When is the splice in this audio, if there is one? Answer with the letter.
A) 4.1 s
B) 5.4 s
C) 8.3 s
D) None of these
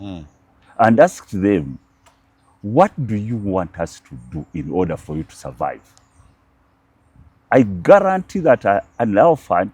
D